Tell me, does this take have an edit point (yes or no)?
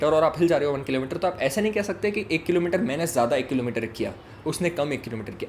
no